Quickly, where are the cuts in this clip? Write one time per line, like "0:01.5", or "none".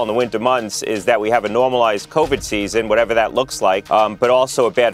0:03.8